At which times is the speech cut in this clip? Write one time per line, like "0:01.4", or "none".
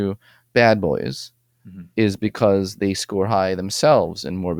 none